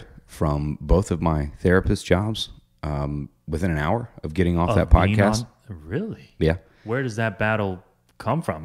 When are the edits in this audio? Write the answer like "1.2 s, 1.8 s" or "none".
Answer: 6.7 s